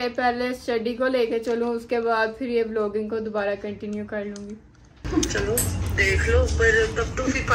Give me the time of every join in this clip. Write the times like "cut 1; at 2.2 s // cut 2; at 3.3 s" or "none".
none